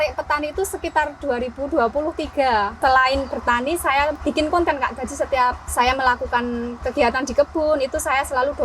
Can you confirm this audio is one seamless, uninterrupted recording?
no; 3 cuts; at 2.8 s, 4.2 s, 5.6 s

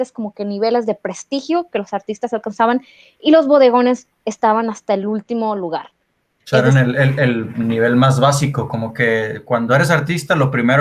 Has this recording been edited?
no; 0 cuts

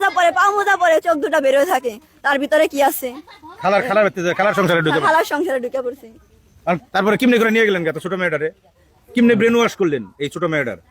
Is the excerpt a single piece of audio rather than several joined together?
no; 1 cut; at 6.8 s

